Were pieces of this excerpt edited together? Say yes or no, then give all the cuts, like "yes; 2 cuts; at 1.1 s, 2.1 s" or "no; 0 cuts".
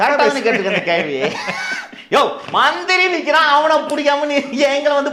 no; 0 cuts